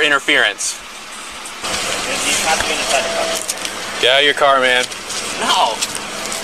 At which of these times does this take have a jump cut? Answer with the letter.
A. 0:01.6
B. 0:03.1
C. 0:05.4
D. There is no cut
A